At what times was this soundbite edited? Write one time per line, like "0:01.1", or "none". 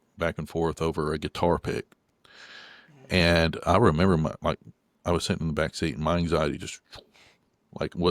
none